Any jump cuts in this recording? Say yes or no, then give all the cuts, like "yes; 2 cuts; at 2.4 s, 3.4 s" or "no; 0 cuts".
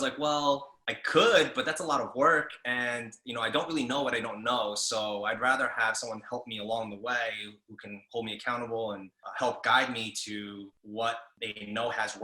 yes; 2 cuts; at 9.2 s, 11.1 s